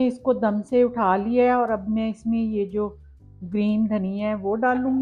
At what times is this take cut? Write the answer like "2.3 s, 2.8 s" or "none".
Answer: none

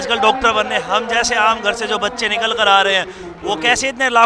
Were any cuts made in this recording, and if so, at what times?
none

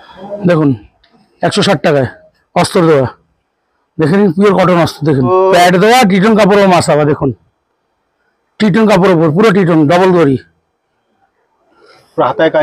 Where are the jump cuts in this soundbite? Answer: 5.3 s

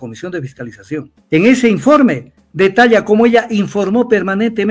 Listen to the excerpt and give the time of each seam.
1.1 s

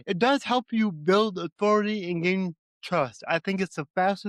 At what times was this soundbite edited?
none

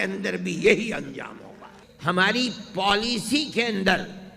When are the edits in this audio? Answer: 1.5 s

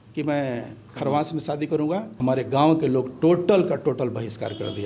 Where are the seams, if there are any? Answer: 2.1 s

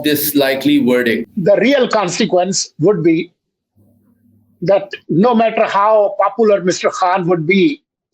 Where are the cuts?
1.3 s

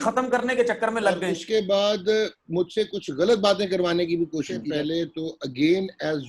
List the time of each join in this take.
1.3 s, 4.6 s

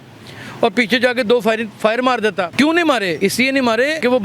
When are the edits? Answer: 2.5 s, 3.4 s

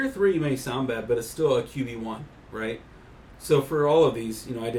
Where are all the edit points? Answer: none

